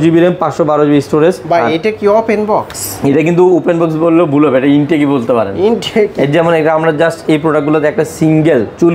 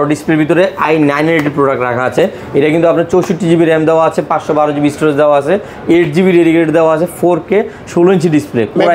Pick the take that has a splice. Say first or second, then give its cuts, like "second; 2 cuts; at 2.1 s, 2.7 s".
first; 1 cut; at 1.4 s